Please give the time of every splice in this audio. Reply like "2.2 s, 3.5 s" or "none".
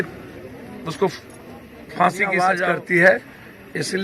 2.6 s